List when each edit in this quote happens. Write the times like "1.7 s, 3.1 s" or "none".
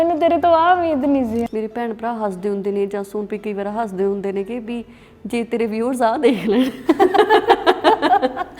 1.5 s